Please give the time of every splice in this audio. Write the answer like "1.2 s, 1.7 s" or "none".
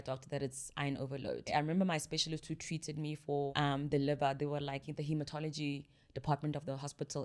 1.5 s, 3.5 s, 4.9 s